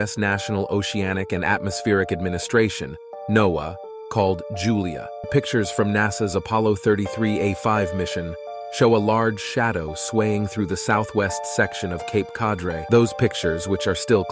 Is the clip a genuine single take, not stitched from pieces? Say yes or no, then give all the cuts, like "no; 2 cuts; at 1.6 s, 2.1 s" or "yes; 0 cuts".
no; 2 cuts; at 5.3 s, 12.8 s